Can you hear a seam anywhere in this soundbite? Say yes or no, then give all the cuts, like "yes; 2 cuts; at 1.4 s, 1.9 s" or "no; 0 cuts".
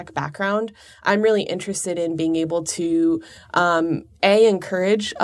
no; 0 cuts